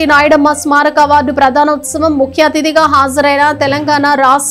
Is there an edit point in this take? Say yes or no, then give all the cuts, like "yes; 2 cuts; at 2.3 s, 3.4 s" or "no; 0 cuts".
no; 0 cuts